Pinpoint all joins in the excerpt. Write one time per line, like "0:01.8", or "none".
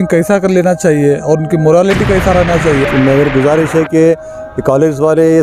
0:02.9